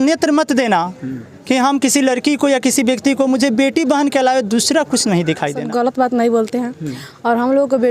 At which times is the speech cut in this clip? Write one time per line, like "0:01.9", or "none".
0:05.6